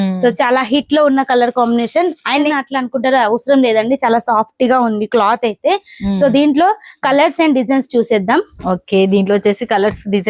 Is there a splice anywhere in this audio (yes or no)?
yes